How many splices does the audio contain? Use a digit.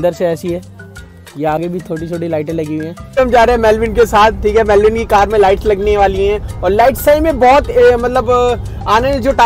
1